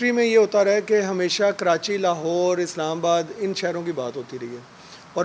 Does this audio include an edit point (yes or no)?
no